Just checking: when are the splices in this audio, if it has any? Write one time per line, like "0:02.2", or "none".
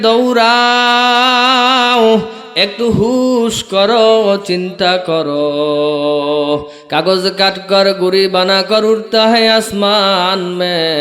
0:06.8